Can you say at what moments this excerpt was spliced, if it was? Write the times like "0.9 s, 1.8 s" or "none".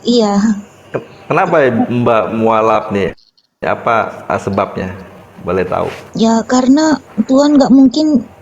6.0 s, 7.1 s